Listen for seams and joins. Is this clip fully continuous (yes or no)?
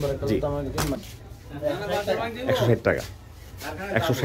no